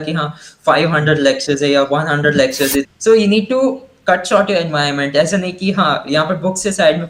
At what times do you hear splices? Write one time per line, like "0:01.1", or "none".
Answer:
0:02.9